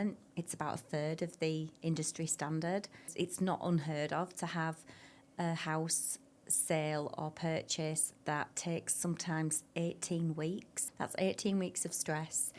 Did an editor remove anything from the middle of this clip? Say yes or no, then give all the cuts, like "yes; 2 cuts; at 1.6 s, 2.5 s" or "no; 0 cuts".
yes; 2 cuts; at 3.1 s, 10.8 s